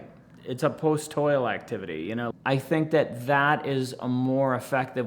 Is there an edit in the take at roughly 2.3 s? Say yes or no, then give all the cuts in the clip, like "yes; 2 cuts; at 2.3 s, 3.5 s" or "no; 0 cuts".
yes; 1 cut; at 2.3 s